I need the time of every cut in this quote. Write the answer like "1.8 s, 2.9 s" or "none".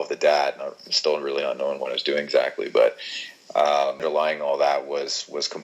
4.0 s